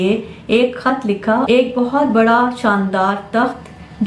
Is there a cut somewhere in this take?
yes; 1 cut; at 1.5 s

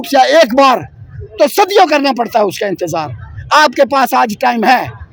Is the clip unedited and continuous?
yes; 0 cuts

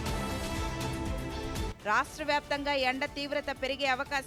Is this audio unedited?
yes; 0 cuts

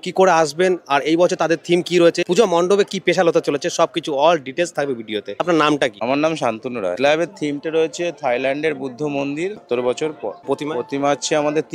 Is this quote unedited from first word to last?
yes; 0 cuts

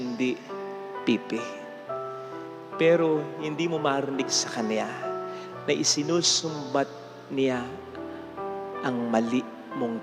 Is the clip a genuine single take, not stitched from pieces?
yes; 0 cuts

